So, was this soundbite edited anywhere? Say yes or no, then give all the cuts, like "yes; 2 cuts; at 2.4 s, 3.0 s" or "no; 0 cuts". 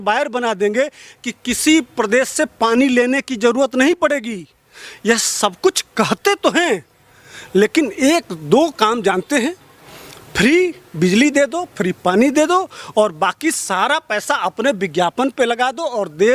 no; 0 cuts